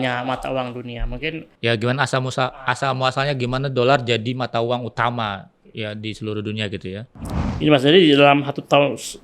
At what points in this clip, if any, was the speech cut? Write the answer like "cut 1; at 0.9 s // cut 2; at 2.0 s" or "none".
cut 1; at 1.5 s // cut 2; at 7.1 s